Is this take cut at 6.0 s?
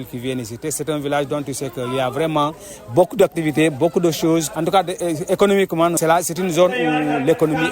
yes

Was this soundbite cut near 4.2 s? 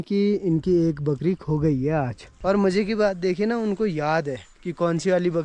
no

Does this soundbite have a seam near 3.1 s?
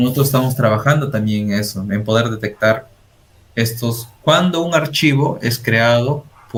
no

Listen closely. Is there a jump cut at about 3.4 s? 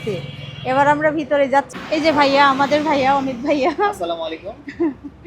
no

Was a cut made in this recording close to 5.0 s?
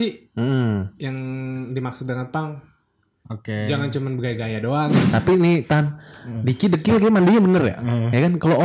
yes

